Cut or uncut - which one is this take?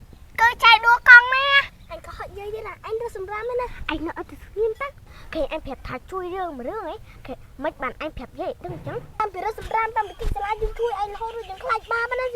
cut